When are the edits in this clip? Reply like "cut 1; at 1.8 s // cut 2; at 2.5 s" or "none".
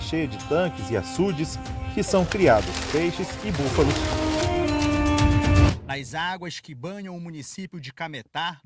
cut 1; at 5.7 s